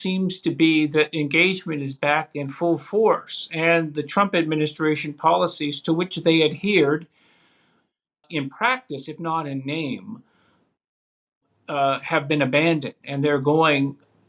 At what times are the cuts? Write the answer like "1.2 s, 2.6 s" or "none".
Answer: none